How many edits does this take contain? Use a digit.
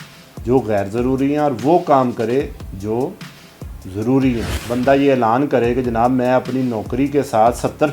1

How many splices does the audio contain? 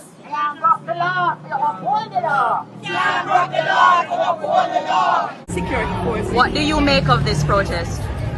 1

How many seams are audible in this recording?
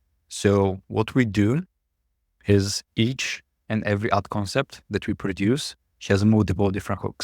0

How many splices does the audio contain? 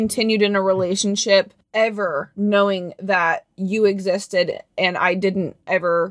0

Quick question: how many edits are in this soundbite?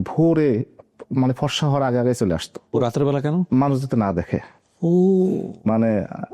1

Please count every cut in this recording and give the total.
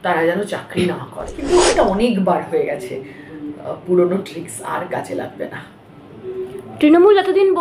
1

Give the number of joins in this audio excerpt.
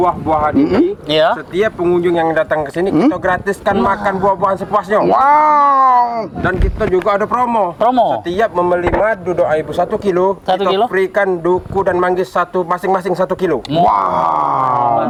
0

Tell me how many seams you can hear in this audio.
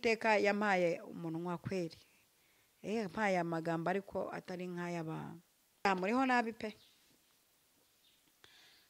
1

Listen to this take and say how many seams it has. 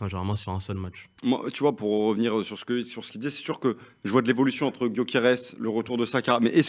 0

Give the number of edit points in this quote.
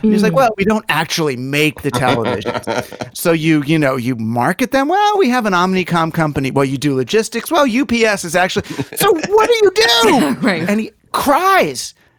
2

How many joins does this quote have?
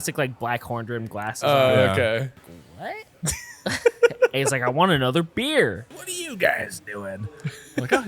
2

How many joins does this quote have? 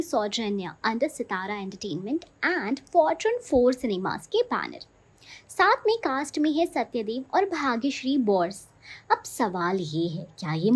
0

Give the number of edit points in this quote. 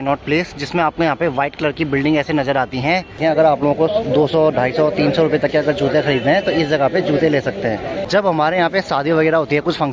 2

